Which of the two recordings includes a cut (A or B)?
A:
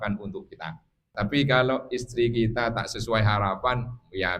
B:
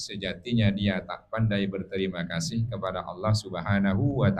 A